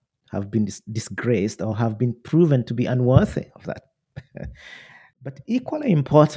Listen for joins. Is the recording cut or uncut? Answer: cut